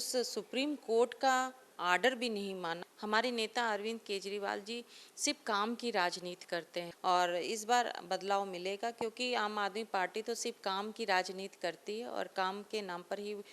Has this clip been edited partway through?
yes; 2 cuts; at 2.9 s, 6.9 s

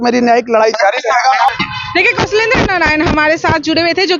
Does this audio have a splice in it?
no; 0 cuts

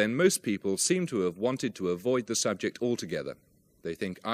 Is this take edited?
no; 0 cuts

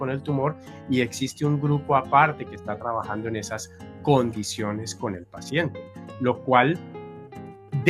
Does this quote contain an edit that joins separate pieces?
no; 0 cuts

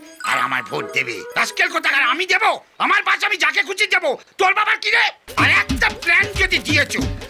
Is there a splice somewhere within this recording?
yes; 2 cuts; at 1.2 s, 5.2 s

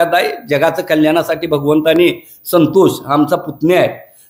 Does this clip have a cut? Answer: no; 0 cuts

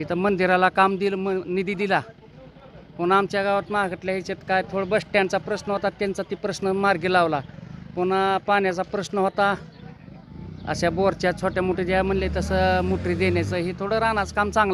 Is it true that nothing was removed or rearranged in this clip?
yes; 0 cuts

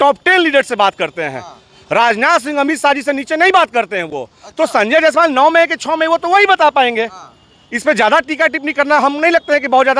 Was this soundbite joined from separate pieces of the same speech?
no; 0 cuts

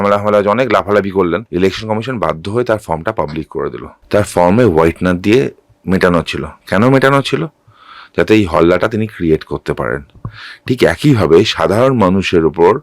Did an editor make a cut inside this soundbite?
yes; 2 cuts; at 1.5 s, 3.9 s

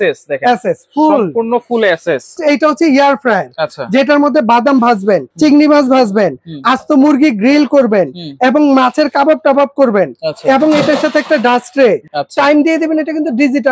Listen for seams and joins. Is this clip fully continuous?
no; 3 cuts; at 2.4 s, 5.3 s, 12.0 s

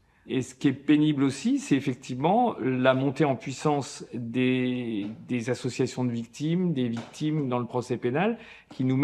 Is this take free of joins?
yes; 0 cuts

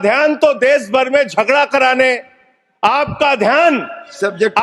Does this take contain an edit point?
no; 0 cuts

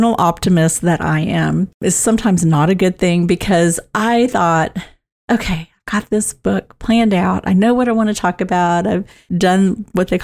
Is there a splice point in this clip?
yes; 1 cut; at 1.7 s

